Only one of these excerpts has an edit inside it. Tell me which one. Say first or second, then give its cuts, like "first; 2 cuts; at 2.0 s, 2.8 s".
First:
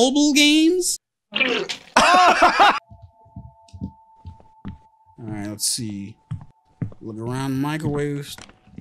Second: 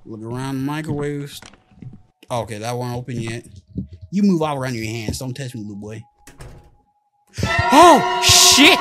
first; 1 cut; at 2.8 s